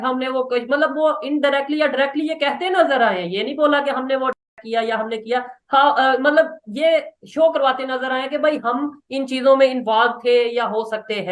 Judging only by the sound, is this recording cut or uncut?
uncut